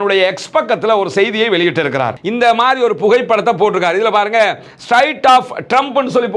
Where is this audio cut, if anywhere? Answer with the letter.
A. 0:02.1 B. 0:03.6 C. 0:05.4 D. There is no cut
A